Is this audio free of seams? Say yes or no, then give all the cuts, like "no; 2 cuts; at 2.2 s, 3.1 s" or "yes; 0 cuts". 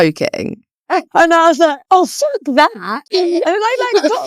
no; 1 cut; at 1.1 s